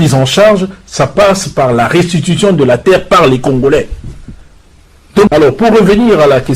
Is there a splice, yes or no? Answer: yes